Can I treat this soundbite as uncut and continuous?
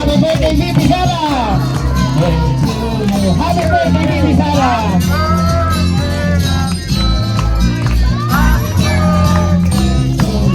yes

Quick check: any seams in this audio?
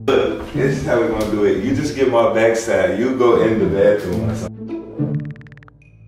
yes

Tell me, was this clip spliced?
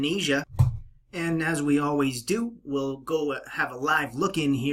no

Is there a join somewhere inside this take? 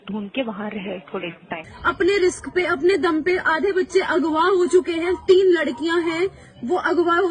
yes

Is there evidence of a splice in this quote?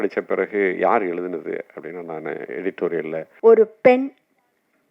yes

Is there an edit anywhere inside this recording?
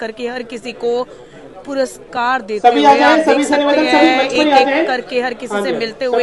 no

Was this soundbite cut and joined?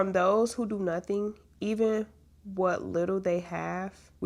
no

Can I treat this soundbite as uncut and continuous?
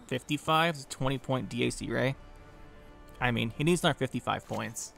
yes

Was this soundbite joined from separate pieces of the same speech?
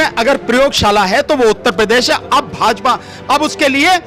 no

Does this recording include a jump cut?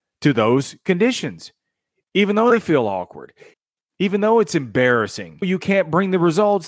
yes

